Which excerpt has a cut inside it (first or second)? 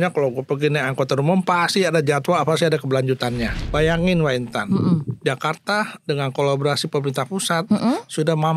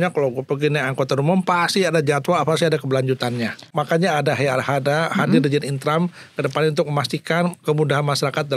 first